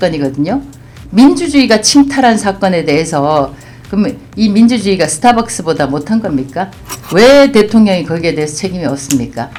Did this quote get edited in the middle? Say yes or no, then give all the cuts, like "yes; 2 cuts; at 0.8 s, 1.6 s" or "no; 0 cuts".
no; 0 cuts